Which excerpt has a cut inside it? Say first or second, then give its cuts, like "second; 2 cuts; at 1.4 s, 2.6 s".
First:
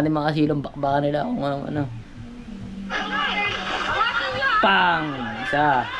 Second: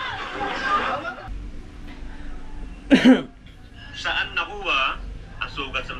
second; 1 cut; at 1.3 s